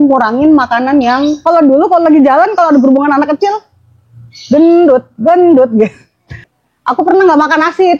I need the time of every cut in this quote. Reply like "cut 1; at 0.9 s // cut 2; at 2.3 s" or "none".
cut 1; at 1.4 s // cut 2; at 6.5 s